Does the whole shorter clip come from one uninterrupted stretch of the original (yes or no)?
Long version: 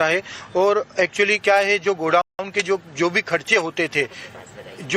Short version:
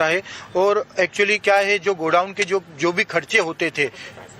no